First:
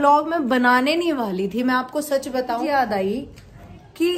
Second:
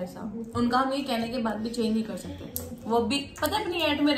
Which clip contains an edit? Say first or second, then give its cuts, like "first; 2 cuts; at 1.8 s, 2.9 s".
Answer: first; 1 cut; at 2.6 s